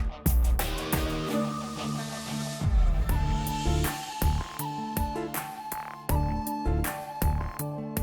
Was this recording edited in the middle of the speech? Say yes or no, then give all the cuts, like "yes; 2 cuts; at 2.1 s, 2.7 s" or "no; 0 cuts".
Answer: yes; 1 cut; at 3.1 s